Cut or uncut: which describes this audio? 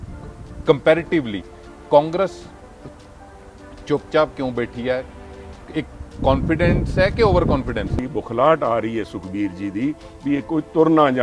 cut